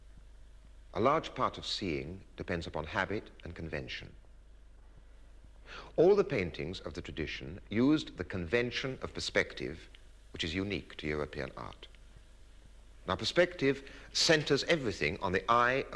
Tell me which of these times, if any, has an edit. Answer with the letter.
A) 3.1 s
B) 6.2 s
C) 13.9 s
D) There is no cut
A